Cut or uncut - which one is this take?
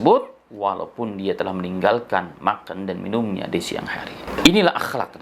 cut